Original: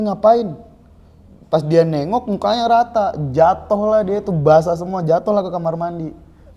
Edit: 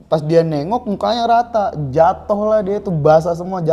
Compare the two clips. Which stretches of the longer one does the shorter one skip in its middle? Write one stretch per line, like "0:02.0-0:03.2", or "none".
none